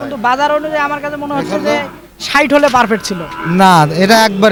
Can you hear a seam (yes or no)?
no